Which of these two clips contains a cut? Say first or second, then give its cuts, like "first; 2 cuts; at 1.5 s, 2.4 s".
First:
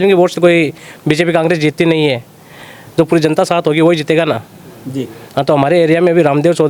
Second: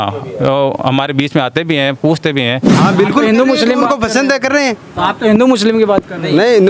second; 1 cut; at 2.7 s